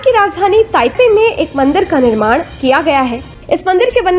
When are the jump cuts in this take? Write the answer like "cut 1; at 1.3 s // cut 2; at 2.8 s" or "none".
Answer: cut 1; at 0.9 s // cut 2; at 3.3 s